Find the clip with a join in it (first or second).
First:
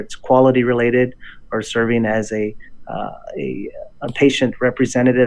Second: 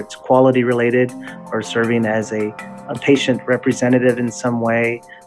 second